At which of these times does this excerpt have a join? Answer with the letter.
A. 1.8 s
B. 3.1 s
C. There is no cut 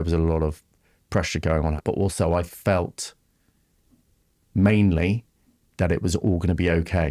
A